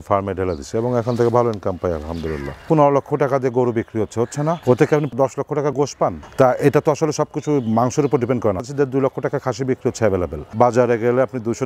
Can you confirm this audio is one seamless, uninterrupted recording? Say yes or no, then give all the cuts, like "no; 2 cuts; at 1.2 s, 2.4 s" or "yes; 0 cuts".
no; 4 cuts; at 2.6 s, 6.2 s, 8.6 s, 10.5 s